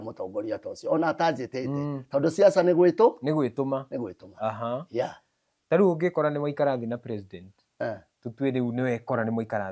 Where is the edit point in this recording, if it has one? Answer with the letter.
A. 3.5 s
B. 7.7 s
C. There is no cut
C